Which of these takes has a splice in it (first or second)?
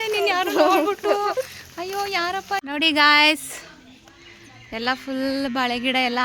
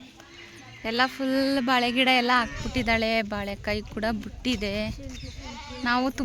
first